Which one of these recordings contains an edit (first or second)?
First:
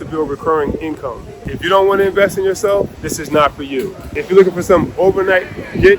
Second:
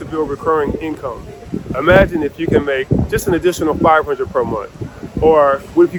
first